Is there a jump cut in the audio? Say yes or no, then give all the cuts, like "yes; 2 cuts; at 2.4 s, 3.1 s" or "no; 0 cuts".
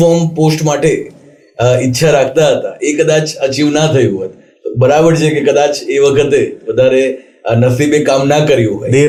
no; 0 cuts